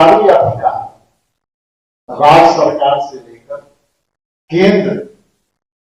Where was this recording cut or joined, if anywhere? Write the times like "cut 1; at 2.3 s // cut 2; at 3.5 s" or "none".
none